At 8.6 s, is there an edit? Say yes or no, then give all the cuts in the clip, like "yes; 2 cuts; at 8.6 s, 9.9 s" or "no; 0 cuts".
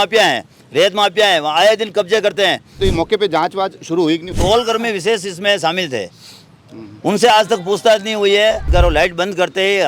yes; 3 cuts; at 2.7 s, 4.3 s, 8.6 s